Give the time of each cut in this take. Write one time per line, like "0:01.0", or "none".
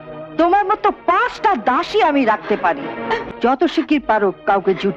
0:03.3